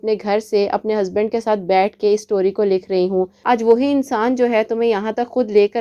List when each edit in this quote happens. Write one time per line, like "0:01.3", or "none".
0:03.4